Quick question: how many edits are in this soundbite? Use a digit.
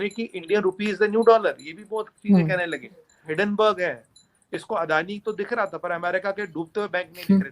1